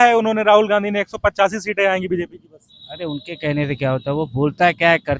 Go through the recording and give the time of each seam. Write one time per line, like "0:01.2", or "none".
none